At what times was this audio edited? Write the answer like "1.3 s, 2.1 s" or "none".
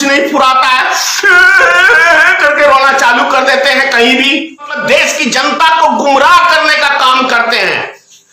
4.8 s